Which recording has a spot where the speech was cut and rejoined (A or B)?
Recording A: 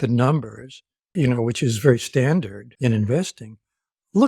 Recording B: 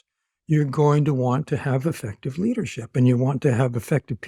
A